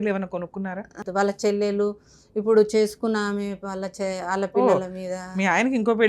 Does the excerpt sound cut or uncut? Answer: cut